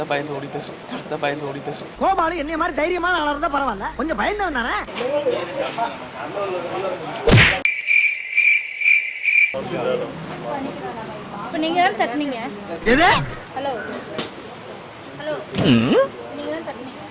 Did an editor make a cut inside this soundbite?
no; 0 cuts

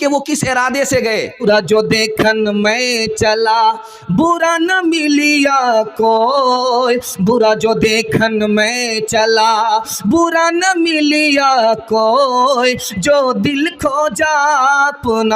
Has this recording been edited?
yes; 1 cut; at 1.4 s

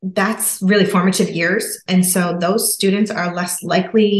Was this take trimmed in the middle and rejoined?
no; 0 cuts

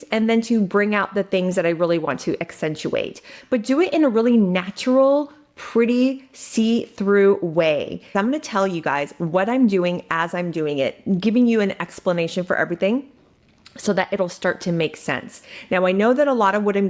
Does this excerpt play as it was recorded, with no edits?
no; 2 cuts; at 3.3 s, 8.0 s

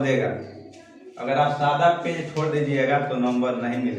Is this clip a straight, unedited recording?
yes; 0 cuts

